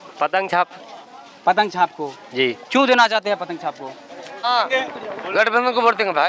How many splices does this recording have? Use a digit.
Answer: 1